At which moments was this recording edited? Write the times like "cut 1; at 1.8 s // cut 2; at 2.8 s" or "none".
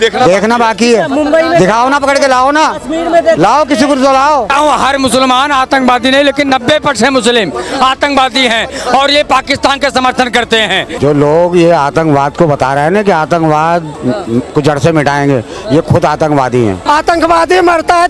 cut 1; at 4.5 s // cut 2; at 10.9 s // cut 3; at 16.8 s